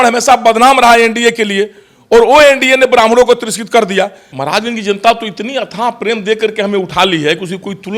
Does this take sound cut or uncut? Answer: cut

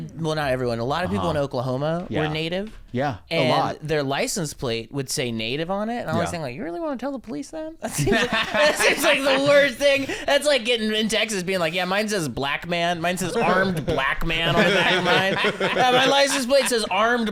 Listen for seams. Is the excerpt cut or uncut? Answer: uncut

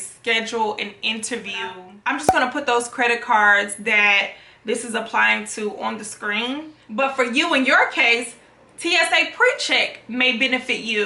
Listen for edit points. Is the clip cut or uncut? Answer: cut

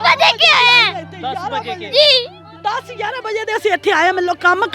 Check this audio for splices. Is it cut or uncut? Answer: uncut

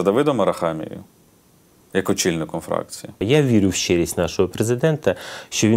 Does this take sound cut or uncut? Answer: cut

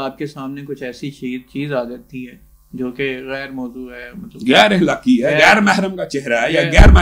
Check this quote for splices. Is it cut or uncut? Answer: uncut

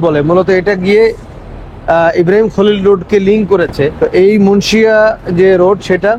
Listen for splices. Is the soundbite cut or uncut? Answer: cut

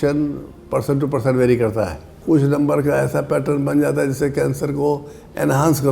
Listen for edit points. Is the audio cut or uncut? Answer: cut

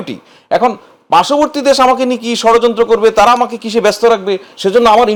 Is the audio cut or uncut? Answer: uncut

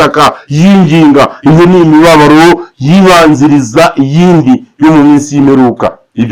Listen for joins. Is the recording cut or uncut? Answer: uncut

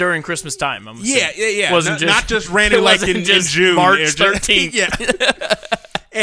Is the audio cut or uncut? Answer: uncut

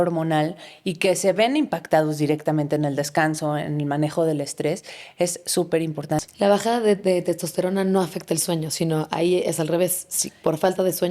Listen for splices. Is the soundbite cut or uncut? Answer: cut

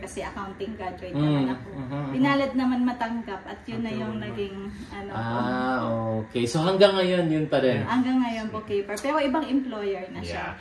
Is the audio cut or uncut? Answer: uncut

